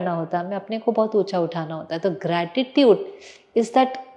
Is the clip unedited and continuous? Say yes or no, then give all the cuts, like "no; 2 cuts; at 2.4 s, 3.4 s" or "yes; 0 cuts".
yes; 0 cuts